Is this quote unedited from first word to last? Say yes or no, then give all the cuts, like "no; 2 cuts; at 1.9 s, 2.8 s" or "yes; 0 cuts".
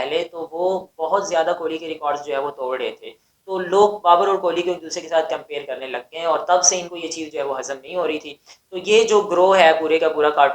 yes; 0 cuts